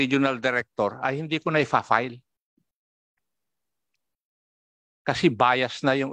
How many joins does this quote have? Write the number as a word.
zero